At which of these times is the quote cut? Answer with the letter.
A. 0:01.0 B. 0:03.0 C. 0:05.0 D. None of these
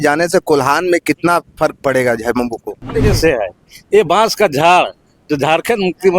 B